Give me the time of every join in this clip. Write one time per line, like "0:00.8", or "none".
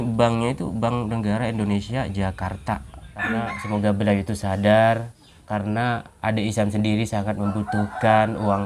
0:03.4